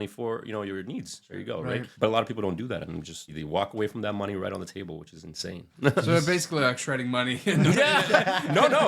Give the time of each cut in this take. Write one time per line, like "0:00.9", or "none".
0:01.6
0:03.4
0:05.6